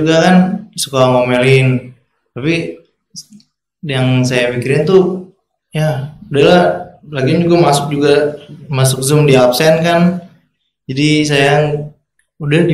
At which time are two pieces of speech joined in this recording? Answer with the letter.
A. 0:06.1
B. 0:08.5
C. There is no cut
C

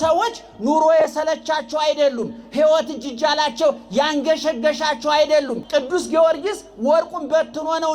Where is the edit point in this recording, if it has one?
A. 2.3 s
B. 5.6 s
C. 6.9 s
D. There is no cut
B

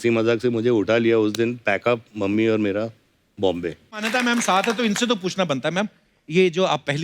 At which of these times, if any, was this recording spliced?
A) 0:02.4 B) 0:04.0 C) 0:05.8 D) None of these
B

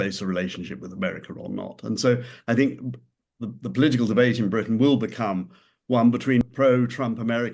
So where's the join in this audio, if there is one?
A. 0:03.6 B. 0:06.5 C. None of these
B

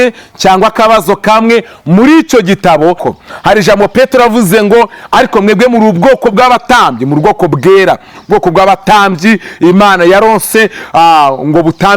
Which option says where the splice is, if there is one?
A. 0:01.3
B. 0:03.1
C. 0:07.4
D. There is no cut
B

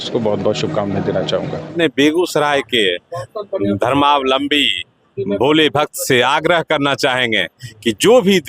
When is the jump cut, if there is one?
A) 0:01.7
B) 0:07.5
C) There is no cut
A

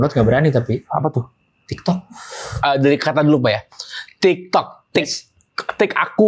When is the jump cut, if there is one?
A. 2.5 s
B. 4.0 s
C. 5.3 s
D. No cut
A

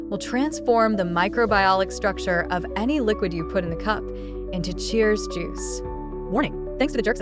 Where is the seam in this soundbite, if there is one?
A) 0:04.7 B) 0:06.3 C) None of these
C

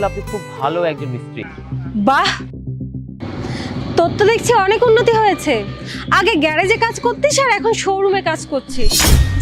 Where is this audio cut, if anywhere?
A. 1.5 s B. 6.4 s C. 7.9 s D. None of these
A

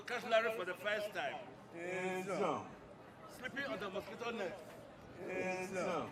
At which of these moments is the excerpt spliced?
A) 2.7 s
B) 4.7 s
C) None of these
C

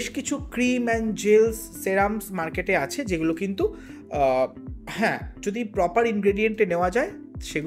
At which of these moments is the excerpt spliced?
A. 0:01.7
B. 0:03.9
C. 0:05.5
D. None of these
D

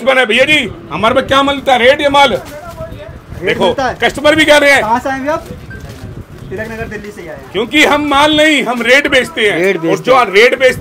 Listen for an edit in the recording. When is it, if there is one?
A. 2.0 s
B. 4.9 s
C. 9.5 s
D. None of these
D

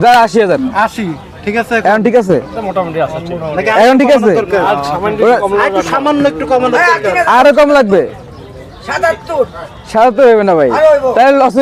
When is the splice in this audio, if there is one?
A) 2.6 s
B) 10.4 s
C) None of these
C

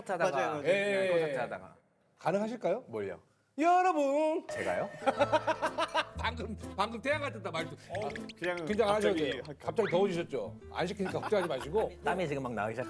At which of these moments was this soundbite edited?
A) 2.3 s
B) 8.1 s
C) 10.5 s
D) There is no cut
B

